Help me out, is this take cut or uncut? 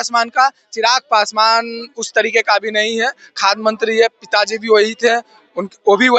uncut